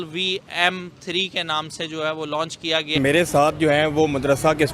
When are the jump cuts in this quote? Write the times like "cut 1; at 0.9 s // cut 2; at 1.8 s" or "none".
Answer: cut 1; at 3.0 s